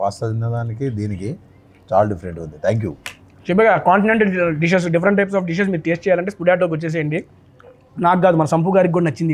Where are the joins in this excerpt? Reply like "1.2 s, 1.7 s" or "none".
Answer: none